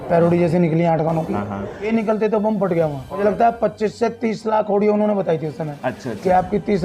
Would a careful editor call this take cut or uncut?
cut